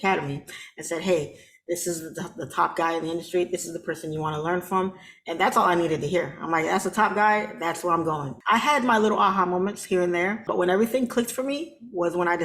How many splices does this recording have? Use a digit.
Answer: 2